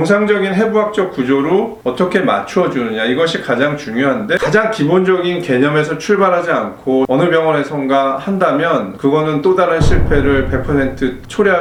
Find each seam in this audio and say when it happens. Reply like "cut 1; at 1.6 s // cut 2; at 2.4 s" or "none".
none